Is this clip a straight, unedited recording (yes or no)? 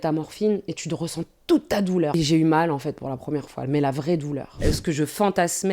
no